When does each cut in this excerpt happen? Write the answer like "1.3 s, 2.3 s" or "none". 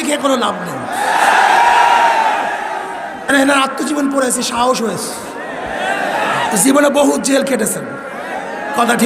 3.3 s